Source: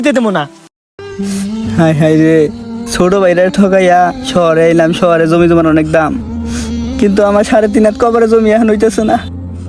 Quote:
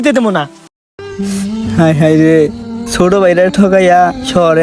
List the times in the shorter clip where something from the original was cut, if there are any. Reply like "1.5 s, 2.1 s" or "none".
none